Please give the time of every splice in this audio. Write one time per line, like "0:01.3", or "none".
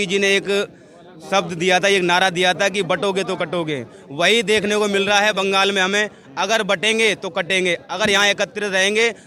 none